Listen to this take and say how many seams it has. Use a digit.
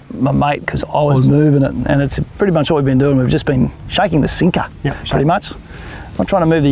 0